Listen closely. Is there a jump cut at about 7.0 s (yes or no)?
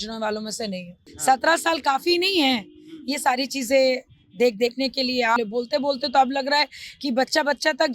no